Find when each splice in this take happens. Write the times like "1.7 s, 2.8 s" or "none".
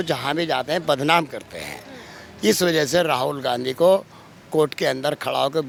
none